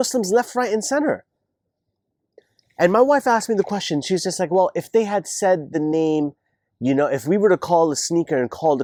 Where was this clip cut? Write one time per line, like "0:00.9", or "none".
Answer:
none